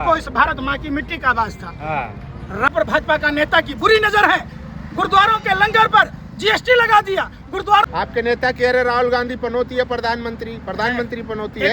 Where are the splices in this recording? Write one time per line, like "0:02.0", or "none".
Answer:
0:02.7
0:07.9